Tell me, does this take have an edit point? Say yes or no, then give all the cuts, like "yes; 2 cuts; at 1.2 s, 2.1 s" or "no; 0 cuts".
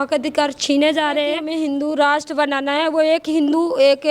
yes; 1 cut; at 1.4 s